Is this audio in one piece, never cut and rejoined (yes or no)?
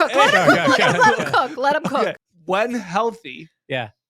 no